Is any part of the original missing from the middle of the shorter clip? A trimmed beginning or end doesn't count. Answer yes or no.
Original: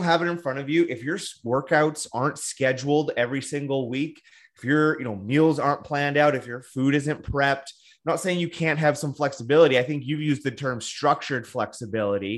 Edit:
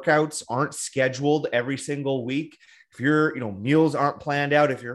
no